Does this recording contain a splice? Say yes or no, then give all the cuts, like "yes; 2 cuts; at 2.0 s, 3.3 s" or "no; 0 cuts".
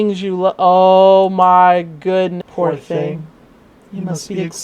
yes; 1 cut; at 2.4 s